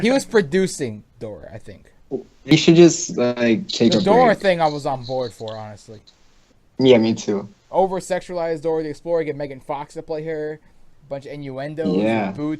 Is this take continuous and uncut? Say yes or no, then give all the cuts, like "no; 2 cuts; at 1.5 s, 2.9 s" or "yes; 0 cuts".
no; 1 cut; at 2.5 s